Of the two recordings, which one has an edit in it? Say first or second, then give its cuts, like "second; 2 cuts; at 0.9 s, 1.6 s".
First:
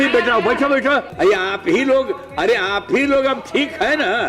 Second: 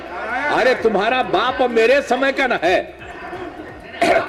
first; 1 cut; at 1.1 s